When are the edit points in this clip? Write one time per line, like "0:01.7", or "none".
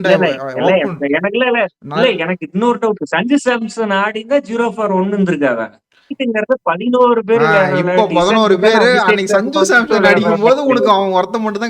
0:06.2